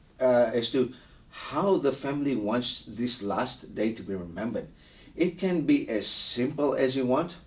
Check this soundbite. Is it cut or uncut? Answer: uncut